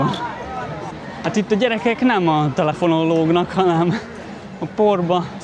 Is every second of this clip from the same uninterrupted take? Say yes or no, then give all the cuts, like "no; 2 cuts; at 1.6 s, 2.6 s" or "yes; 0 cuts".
no; 1 cut; at 1.0 s